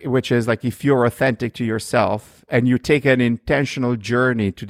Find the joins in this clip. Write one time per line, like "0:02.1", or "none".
none